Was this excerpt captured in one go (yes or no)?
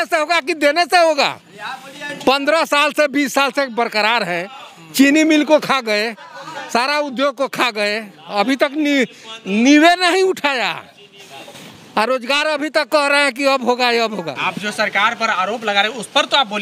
no